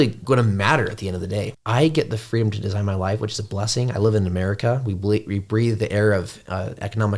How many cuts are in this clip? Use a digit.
1